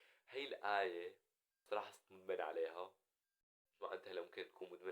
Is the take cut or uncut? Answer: cut